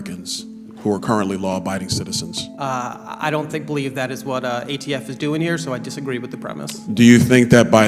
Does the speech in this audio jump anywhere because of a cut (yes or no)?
yes